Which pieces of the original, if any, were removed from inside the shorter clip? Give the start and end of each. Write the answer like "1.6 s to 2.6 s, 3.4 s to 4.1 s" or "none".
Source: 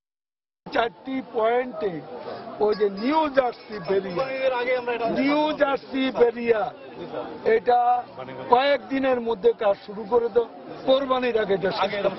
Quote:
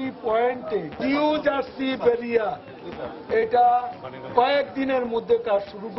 2.1 s to 5.1 s